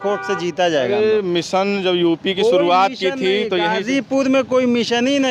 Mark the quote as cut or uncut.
uncut